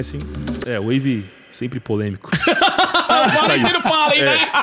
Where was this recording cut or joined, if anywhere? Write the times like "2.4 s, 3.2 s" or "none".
2.2 s